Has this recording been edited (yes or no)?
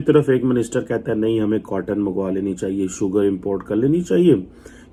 no